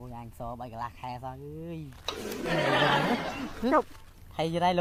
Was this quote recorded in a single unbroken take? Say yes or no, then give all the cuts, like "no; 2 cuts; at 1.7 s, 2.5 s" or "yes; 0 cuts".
yes; 0 cuts